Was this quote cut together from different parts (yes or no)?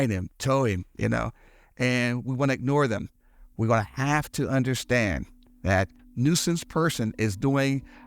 yes